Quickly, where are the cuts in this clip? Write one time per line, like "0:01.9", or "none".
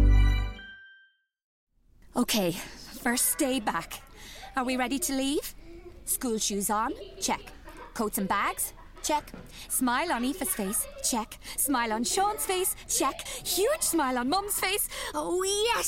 0:01.5

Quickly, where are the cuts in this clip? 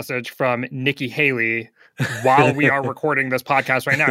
none

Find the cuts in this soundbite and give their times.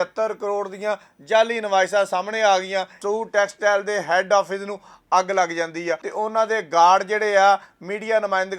0:03.0
0:06.0

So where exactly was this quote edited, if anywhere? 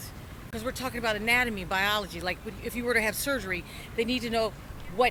none

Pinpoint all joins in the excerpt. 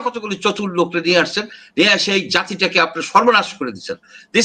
none

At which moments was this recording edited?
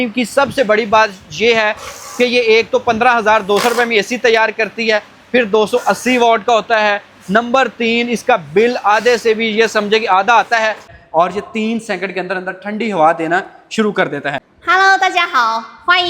0:10.9
0:14.5

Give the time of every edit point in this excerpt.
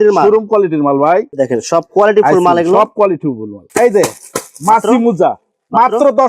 0:01.3
0:03.6

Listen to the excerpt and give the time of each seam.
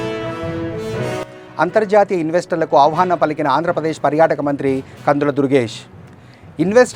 0:01.2

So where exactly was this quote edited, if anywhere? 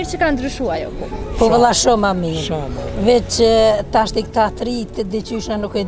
none

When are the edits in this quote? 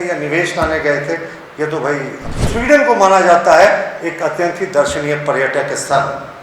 0:02.3

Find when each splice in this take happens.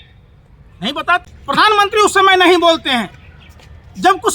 0:01.6

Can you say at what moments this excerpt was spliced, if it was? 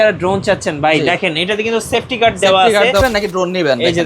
0:03.0

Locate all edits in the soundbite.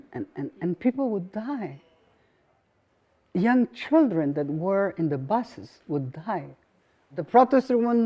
0:07.2

